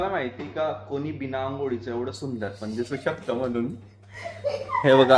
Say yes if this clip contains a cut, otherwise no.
no